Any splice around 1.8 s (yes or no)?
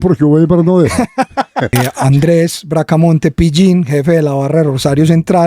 yes